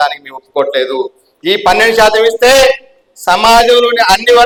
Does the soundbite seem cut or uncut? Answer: uncut